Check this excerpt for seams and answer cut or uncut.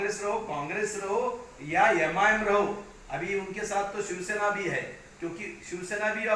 uncut